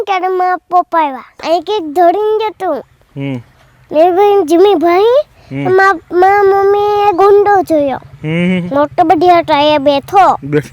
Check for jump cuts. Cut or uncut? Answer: cut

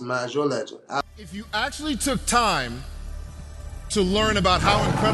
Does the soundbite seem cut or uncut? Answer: cut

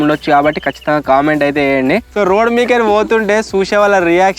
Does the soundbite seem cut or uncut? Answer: cut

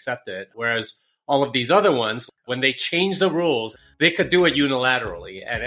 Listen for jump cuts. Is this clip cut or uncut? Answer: cut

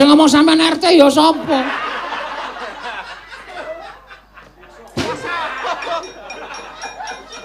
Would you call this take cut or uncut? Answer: cut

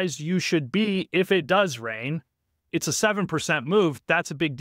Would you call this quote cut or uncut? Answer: cut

